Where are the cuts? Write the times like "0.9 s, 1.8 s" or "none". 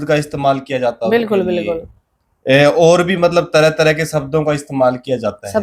none

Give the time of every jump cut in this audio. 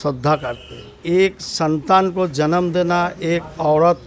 0.9 s

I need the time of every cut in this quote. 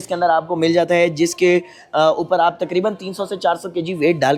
none

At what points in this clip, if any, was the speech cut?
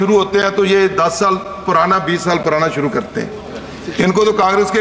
none

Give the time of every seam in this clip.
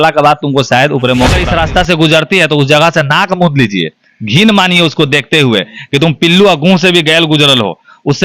1.4 s

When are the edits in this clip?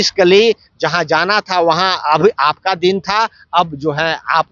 none

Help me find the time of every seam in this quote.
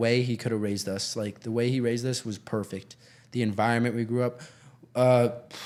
none

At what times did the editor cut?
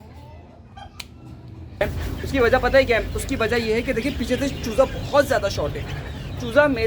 1.8 s

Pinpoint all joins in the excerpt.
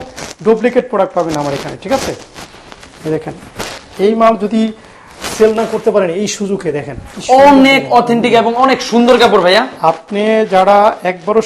none

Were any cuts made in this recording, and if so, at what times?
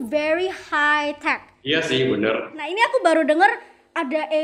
1.5 s, 2.6 s

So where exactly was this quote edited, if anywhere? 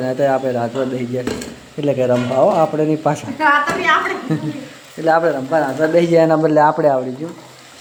none

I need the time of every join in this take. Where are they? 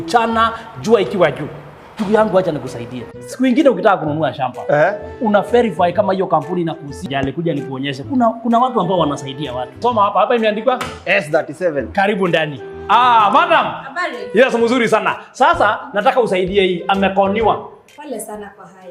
7.0 s

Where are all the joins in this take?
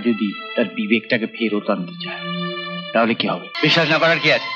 3.5 s

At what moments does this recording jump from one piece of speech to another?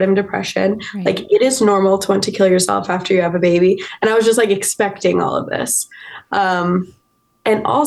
none

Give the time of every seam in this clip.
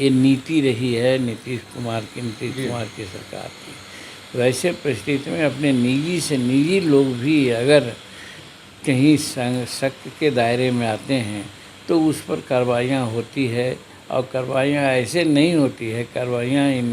none

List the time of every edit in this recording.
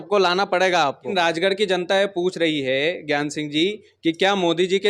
1.1 s

